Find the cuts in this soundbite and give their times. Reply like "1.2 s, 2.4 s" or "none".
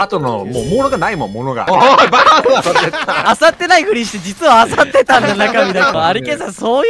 1.6 s, 3.2 s, 5.9 s